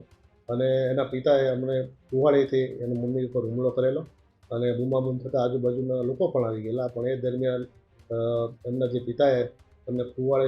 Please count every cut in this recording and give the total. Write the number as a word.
zero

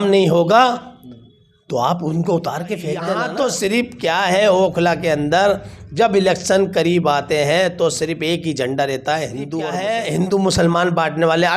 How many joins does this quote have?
two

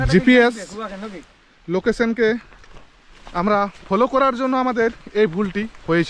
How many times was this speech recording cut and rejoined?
zero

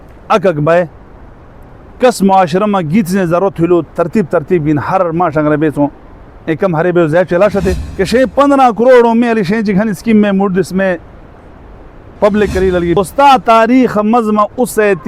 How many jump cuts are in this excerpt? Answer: two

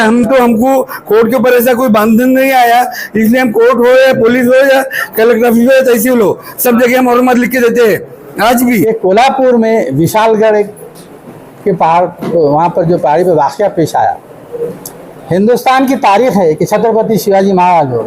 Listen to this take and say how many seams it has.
one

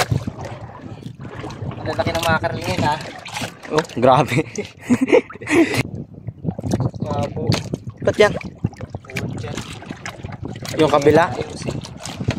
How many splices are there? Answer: one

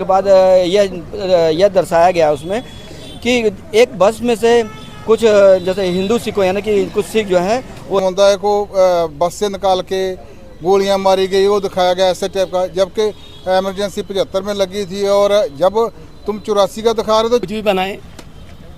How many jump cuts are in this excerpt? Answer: two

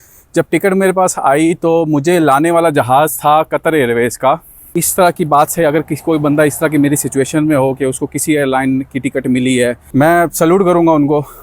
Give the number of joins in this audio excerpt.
two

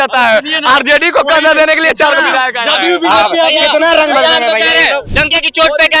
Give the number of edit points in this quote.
one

